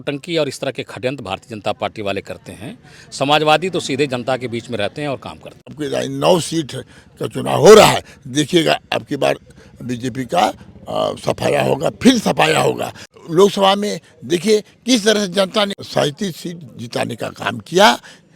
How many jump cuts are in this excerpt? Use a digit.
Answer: 3